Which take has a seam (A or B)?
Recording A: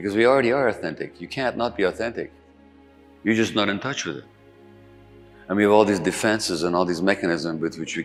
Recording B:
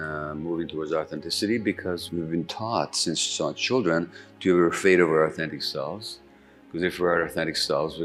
B